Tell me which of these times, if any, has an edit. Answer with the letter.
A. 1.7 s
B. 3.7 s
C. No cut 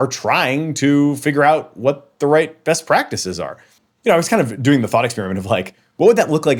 B